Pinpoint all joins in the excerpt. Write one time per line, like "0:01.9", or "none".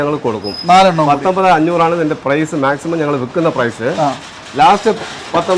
none

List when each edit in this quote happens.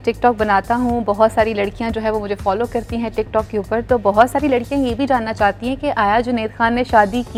none

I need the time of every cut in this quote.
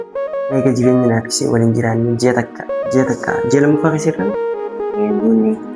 none

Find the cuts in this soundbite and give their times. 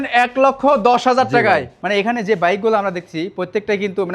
0:01.7

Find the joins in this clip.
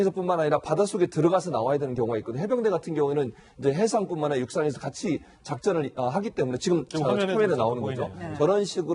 0:02.9

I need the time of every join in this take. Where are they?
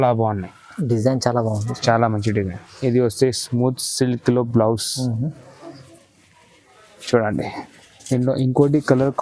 none

